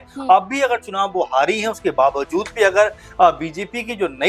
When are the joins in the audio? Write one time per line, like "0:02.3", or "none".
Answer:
none

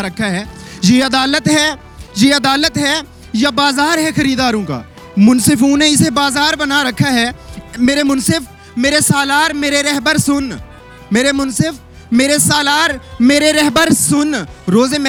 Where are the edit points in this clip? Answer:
none

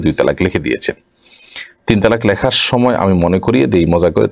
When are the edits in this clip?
none

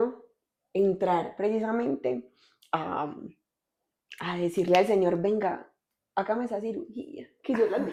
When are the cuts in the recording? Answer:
none

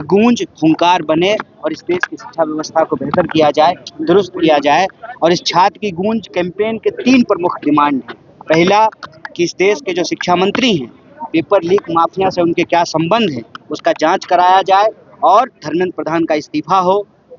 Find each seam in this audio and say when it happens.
none

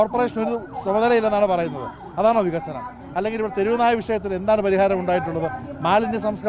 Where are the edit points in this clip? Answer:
none

